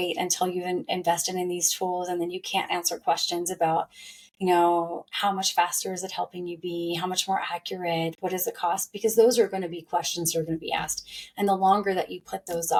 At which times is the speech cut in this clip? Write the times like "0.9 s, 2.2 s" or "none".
none

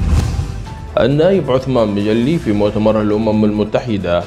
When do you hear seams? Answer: 0.9 s

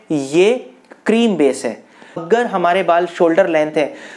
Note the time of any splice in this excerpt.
2.2 s

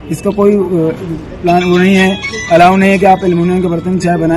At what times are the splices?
none

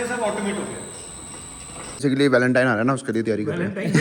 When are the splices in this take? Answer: 2.0 s

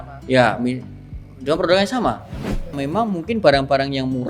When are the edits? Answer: 2.8 s

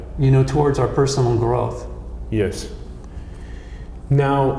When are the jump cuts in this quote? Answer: none

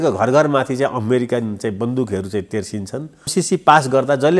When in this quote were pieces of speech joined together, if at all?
3.3 s

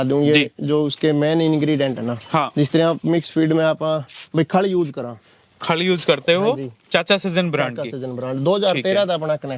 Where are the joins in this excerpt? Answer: none

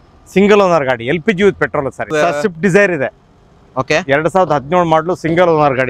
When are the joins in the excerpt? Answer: 2.1 s

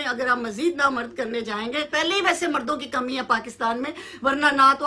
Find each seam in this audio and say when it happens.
1.9 s

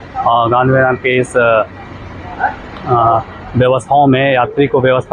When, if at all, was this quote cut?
none

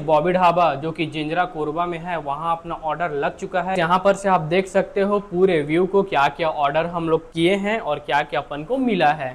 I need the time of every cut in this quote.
3.7 s

